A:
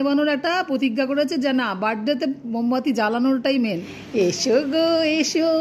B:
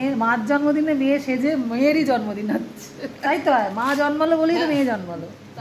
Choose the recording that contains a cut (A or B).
A